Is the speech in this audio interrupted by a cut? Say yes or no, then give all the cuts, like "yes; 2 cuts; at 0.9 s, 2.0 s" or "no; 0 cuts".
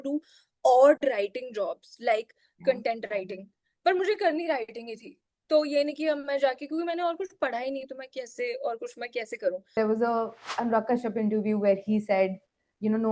yes; 1 cut; at 9.7 s